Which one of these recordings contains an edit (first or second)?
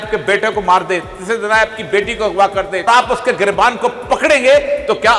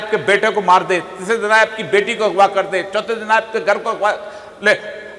first